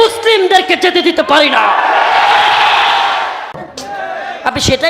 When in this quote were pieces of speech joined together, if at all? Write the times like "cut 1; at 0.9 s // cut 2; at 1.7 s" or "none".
cut 1; at 3.6 s